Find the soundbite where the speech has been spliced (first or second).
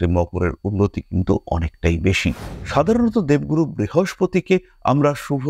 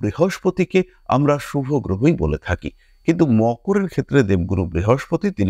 first